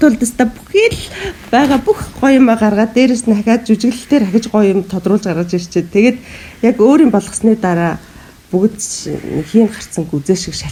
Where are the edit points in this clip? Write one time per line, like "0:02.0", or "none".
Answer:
none